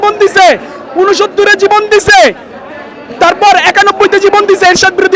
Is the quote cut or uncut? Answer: uncut